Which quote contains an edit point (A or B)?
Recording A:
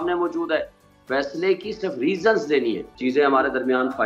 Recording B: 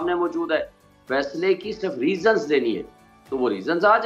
A